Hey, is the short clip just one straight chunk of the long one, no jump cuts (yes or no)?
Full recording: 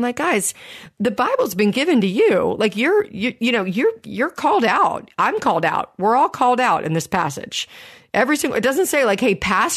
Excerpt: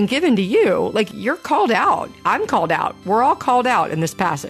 no